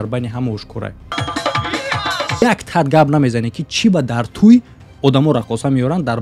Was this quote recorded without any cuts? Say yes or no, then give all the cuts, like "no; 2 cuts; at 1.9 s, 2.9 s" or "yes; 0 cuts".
no; 2 cuts; at 1.0 s, 2.4 s